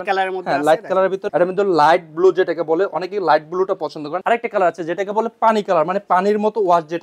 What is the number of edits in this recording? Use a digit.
2